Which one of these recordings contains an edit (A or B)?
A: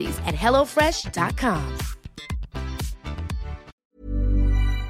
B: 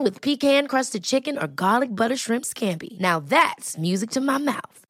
A